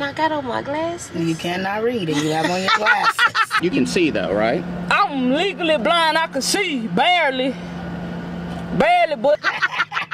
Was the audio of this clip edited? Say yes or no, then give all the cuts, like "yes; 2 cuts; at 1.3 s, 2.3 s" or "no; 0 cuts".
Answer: yes; 2 cuts; at 3.5 s, 9.3 s